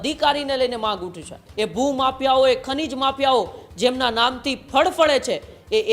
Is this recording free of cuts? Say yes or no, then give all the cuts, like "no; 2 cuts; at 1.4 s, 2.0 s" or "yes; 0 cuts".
no; 1 cut; at 1.4 s